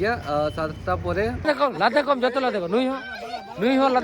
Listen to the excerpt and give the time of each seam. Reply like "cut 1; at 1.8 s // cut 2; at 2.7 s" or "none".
cut 1; at 1.5 s